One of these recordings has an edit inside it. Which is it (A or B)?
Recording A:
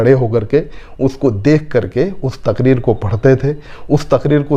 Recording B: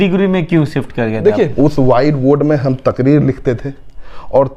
B